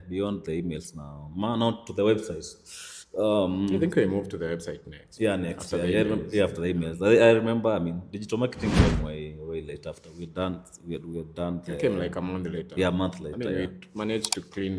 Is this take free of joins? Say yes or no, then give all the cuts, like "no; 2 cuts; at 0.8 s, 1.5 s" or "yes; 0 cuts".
yes; 0 cuts